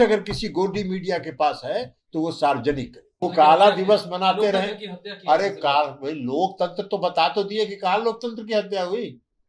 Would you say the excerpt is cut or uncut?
cut